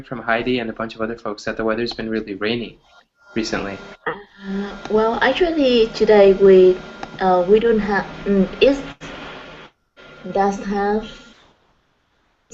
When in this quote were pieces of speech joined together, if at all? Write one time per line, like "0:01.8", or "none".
none